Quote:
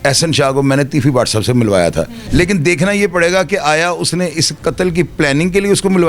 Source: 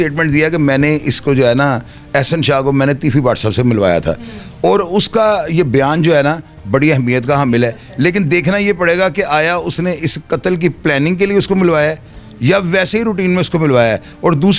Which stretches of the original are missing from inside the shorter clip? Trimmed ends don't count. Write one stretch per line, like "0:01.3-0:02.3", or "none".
0:04.3-0:07.8